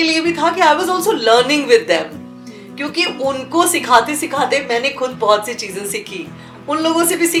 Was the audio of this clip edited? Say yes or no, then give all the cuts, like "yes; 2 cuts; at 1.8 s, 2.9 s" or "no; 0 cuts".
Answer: no; 0 cuts